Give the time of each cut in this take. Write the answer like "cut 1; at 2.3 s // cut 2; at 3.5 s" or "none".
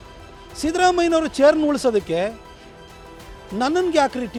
none

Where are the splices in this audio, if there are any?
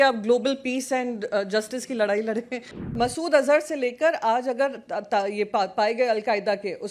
cut 1; at 2.9 s

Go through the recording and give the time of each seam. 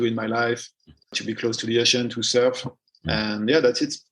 cut 1; at 1.0 s

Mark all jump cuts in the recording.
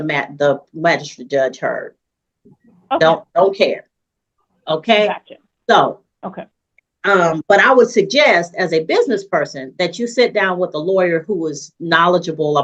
none

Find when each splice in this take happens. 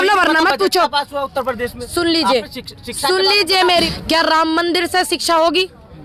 cut 1; at 3.6 s

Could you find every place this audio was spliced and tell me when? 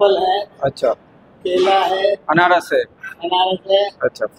none

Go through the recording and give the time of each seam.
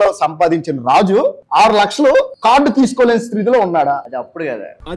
cut 1; at 1.4 s // cut 2; at 2.3 s // cut 3; at 4.1 s

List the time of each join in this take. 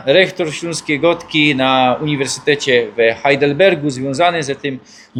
none

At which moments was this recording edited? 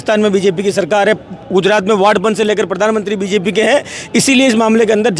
none

